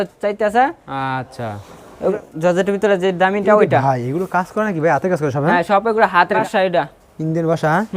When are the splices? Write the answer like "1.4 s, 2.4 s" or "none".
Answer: 2.1 s, 6.4 s